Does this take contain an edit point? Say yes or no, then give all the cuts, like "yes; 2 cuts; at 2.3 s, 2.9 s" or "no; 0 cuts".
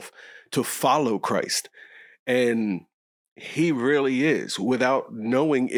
no; 0 cuts